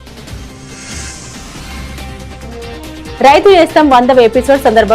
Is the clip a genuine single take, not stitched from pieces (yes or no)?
no